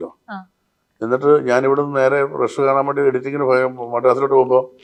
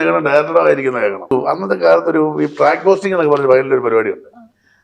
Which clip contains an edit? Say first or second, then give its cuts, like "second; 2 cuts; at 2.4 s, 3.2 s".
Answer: second; 1 cut; at 1.3 s